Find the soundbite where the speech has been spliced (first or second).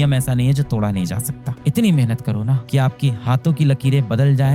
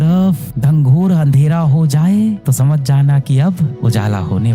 first